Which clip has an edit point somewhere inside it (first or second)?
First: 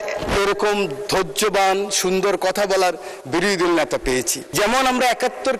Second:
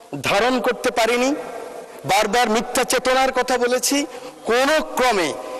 first